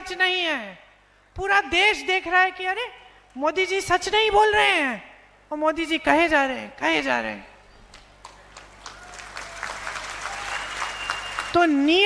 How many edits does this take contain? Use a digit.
0